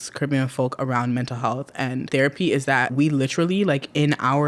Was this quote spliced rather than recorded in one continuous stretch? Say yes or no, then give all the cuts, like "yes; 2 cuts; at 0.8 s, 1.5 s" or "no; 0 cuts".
yes; 2 cuts; at 2.1 s, 2.9 s